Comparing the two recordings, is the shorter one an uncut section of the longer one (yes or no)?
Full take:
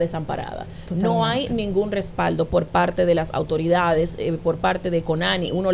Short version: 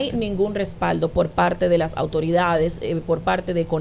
yes